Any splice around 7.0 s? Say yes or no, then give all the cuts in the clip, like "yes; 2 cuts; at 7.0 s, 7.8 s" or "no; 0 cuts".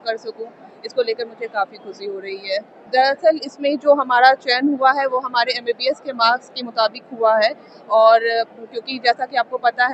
no; 1 cut; at 2.8 s